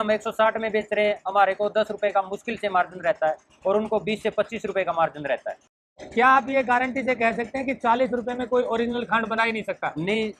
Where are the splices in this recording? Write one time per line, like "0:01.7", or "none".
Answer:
0:05.8